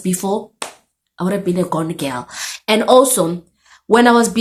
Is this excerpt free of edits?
yes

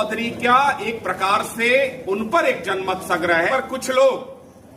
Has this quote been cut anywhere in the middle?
yes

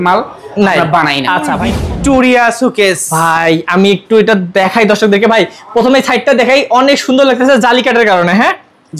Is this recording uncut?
no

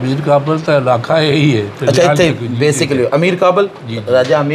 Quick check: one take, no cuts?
yes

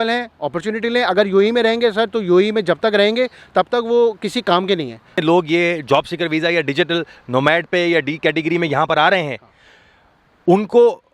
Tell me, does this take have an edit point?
yes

